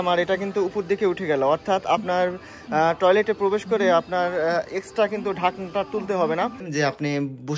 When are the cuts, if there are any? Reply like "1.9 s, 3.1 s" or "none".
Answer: 6.7 s